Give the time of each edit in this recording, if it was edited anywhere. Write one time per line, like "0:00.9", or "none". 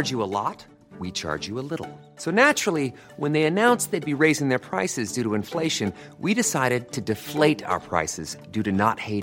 none